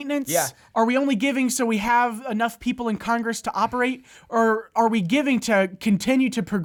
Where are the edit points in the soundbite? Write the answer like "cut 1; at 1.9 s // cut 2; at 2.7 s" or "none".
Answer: none